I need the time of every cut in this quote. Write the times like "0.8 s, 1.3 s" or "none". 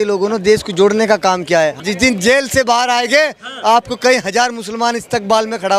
1.8 s